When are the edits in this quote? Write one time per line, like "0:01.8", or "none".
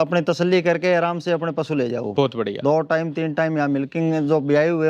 none